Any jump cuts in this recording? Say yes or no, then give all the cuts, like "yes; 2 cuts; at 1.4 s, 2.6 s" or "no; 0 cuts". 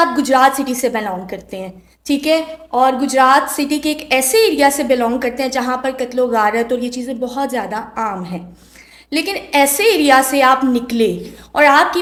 no; 0 cuts